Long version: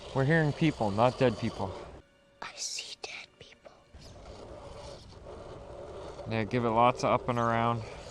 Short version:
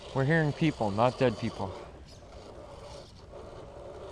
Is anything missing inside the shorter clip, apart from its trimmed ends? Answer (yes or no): yes